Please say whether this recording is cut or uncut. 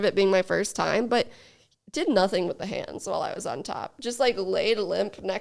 uncut